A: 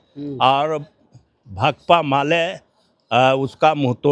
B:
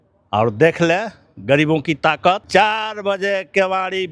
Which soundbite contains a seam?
B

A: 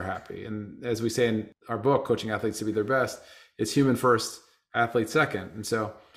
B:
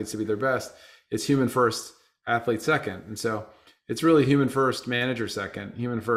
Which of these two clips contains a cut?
A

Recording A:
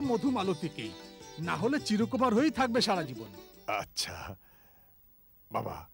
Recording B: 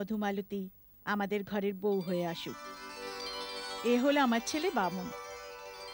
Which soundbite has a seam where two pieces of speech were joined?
A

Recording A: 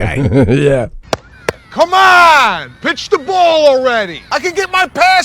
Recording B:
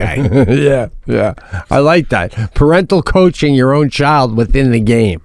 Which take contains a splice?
A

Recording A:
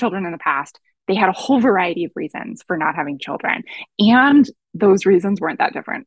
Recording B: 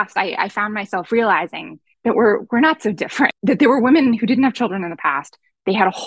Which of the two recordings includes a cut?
B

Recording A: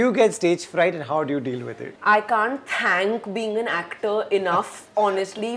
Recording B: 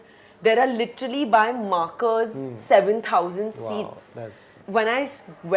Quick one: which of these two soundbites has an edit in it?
B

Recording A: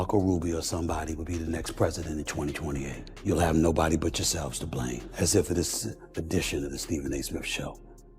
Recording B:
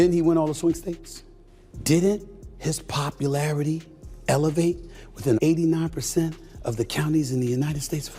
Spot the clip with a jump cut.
A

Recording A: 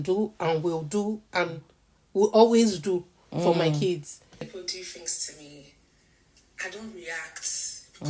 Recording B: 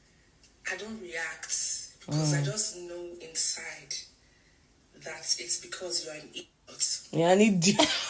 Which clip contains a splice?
A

